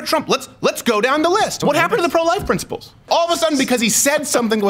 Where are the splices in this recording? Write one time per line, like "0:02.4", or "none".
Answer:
0:01.5
0:03.1